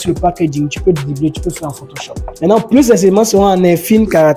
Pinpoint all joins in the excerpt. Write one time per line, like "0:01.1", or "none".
0:02.3